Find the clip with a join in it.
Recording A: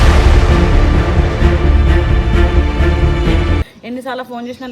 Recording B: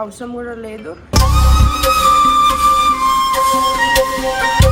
A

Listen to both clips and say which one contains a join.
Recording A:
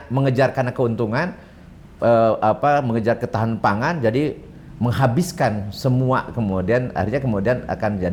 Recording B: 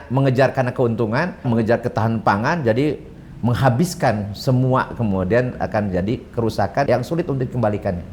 B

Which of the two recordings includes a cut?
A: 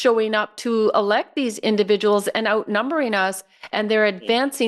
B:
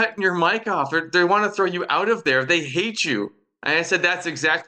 A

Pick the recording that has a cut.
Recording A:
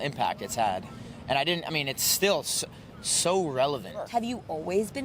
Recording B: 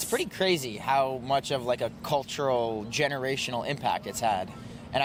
A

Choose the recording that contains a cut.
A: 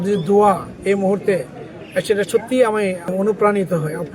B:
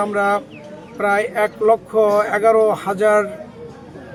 A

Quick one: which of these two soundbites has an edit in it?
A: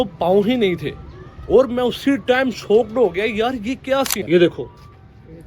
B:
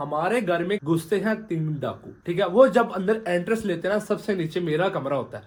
A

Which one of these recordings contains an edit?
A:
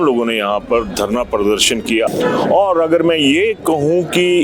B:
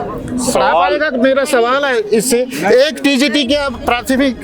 A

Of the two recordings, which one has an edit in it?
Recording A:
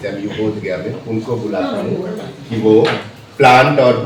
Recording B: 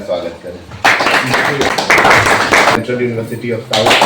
B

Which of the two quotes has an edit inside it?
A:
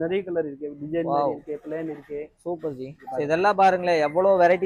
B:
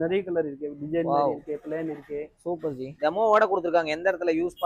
B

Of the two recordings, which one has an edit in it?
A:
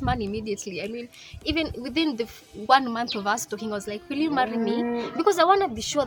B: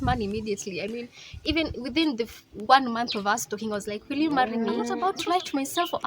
B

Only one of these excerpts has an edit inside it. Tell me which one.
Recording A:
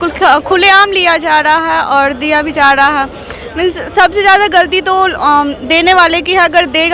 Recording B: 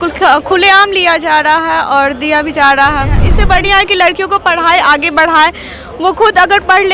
B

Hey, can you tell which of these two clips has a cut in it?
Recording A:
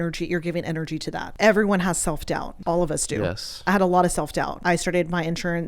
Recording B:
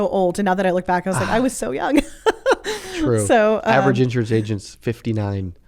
A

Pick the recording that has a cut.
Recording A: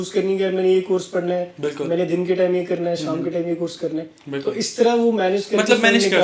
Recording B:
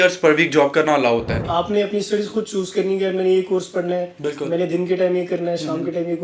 B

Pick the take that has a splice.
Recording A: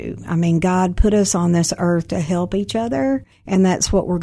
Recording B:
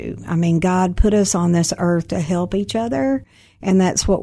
A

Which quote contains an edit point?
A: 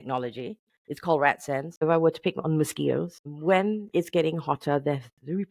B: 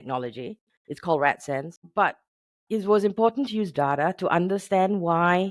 A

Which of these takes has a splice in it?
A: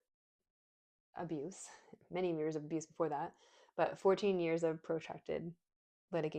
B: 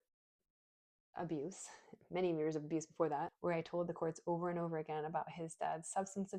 B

